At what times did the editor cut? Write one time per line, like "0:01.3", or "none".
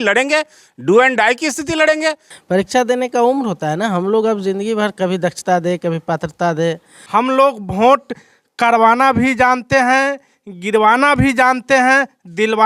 0:02.3
0:06.9

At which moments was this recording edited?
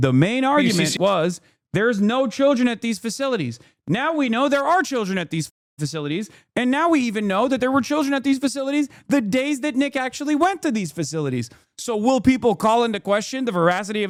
none

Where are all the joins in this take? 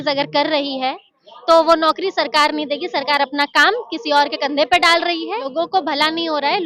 0:05.5

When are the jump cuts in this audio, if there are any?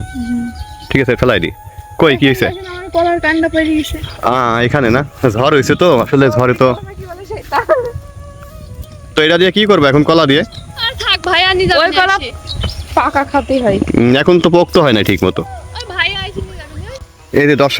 0:01.2

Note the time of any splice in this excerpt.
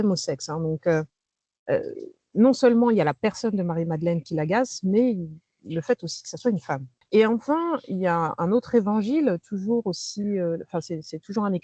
0:06.9

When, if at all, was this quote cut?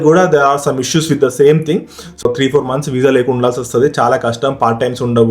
0:02.2

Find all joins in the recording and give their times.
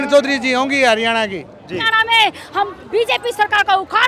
0:01.9

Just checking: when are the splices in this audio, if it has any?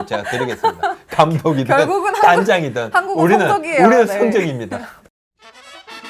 0:05.0

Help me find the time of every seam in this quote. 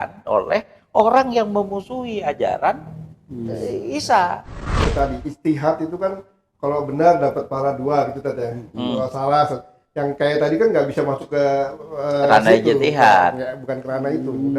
0:04.9

